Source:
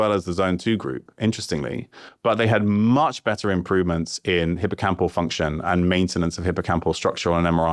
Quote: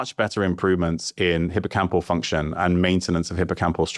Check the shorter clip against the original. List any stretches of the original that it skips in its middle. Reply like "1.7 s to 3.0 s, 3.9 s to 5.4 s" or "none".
none